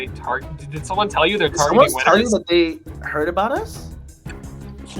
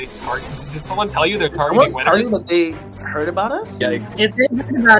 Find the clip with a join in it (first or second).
second